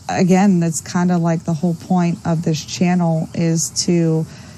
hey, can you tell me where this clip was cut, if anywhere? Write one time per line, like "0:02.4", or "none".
none